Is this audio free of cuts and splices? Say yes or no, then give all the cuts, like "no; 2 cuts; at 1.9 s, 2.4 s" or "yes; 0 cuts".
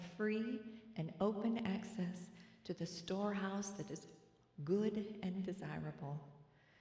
yes; 0 cuts